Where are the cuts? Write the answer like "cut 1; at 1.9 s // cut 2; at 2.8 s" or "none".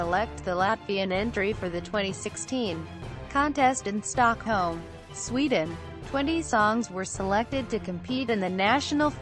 cut 1; at 5.9 s